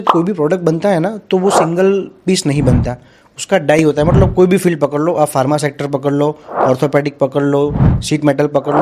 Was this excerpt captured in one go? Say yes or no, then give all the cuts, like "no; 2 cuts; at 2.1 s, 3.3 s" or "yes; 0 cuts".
yes; 0 cuts